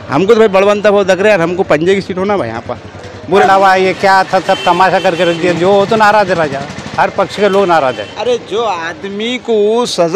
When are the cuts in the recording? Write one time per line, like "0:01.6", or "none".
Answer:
0:03.4

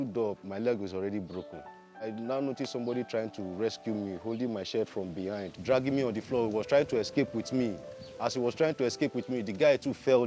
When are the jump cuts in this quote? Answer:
0:02.0
0:05.5

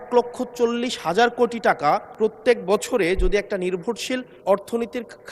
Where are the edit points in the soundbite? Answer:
0:02.1
0:04.3

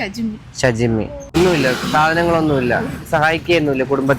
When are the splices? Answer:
0:01.2

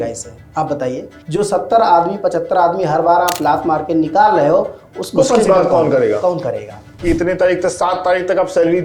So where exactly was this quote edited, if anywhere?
0:01.1
0:07.0

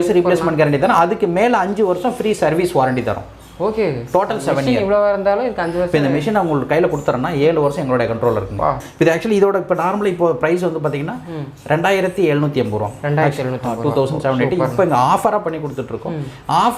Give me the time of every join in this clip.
0:08.9

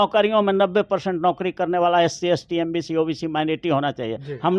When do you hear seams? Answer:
none

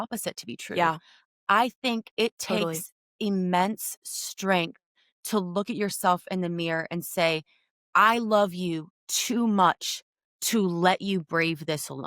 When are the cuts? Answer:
none

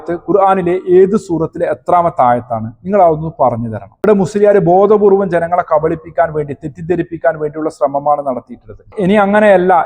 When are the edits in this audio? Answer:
0:08.9

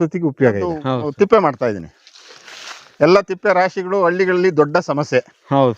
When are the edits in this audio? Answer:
0:01.0

